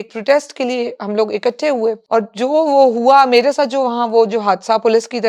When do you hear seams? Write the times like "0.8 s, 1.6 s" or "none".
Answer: 2.0 s